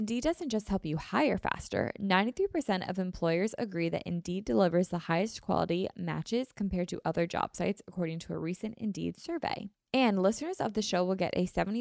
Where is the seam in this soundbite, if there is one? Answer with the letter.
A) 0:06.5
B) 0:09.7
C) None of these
B